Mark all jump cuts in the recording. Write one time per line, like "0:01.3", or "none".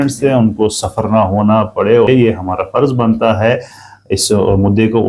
0:02.1